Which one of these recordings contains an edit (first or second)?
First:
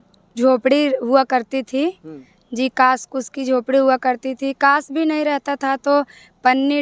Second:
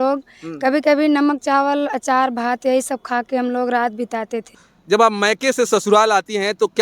second